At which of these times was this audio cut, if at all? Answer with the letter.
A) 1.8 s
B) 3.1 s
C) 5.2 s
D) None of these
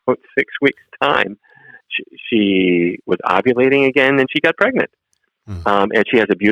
A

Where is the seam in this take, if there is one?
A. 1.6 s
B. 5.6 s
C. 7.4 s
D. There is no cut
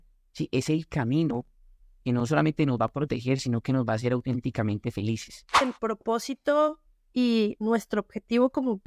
B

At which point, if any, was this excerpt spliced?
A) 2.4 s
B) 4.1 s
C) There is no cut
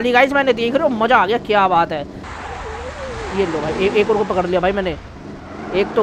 A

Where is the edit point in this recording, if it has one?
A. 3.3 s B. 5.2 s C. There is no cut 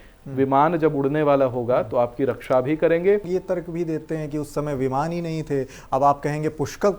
A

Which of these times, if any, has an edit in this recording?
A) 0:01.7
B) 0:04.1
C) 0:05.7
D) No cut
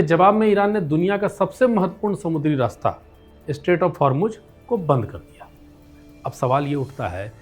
D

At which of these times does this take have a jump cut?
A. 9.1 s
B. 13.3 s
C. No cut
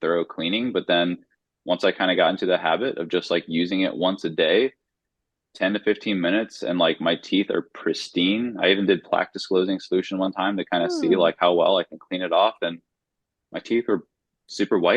C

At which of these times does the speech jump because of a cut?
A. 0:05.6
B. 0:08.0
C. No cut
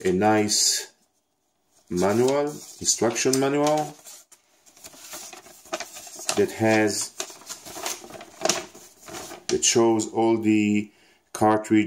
C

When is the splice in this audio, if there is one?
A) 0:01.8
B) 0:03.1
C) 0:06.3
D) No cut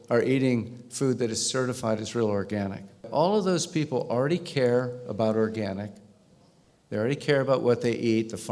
B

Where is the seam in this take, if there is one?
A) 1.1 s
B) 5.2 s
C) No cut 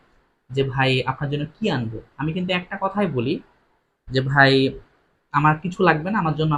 C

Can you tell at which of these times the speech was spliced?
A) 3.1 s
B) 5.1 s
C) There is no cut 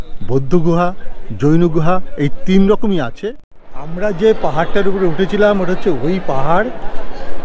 A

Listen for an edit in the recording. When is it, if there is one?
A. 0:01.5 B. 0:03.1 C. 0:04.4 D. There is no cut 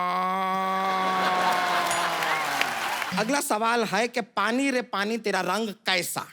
B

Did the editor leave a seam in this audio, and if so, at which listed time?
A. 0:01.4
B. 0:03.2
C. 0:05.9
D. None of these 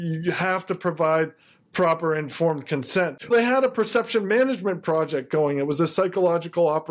B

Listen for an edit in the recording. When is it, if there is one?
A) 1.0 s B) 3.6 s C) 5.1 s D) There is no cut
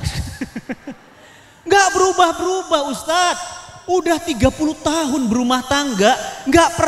D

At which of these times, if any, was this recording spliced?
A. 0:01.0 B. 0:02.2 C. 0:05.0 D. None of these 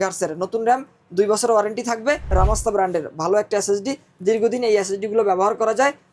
B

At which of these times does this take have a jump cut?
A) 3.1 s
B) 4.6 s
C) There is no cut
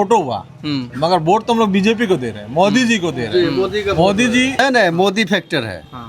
B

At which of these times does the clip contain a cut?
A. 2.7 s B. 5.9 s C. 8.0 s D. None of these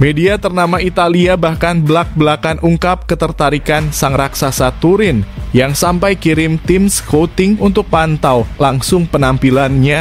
D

